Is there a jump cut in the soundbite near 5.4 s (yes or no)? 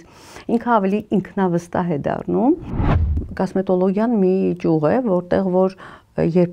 no